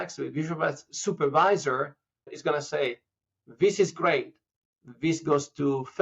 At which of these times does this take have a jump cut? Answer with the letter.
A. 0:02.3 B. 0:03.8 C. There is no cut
A